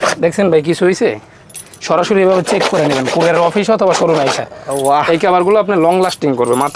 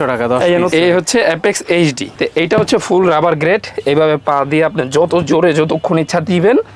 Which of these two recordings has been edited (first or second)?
second